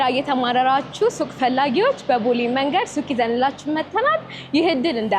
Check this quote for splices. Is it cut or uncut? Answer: uncut